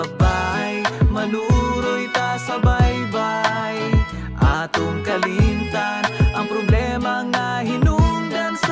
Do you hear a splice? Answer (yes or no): no